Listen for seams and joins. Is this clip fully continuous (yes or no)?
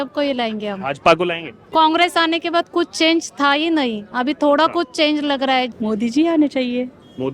no